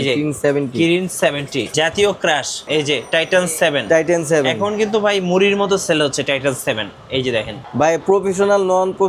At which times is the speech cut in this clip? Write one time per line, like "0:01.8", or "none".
0:01.7
0:07.6